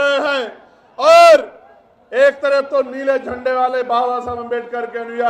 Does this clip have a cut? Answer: no; 0 cuts

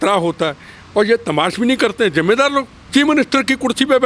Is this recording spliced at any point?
yes; 1 cut; at 2.8 s

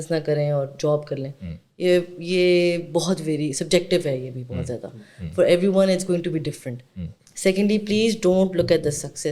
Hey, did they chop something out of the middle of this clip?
no; 0 cuts

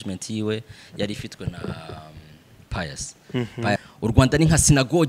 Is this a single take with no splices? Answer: no; 1 cut; at 3.8 s

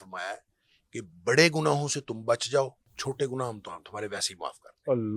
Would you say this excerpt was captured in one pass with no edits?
no; 1 cut; at 2.9 s

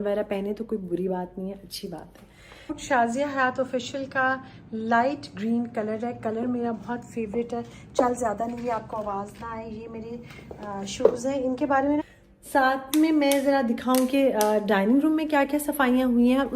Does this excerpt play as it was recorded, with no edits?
no; 2 cuts; at 2.8 s, 12.0 s

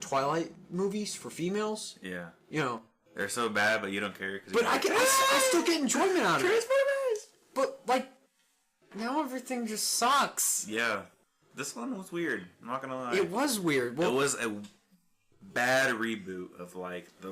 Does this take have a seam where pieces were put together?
yes; 1 cut; at 1.2 s

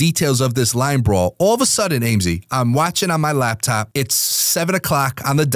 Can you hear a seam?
yes; 1 cut; at 3.9 s

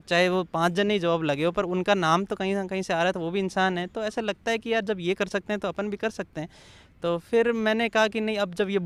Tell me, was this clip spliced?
no; 0 cuts

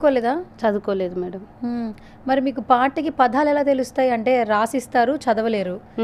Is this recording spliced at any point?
no; 0 cuts

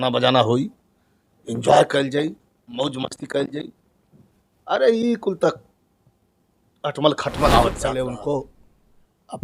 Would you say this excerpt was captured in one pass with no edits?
no; 1 cut; at 7.9 s

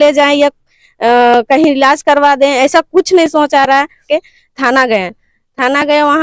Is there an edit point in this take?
yes; 1 cut; at 4.0 s

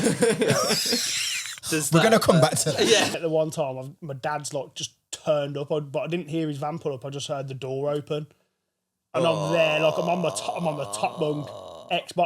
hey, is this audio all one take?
no; 1 cut; at 3.1 s

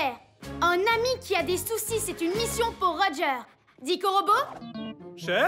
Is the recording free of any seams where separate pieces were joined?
yes; 0 cuts

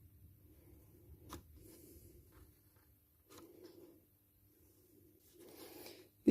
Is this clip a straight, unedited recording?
no; 1 cut; at 5.2 s

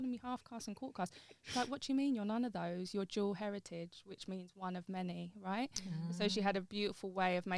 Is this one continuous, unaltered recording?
yes; 0 cuts

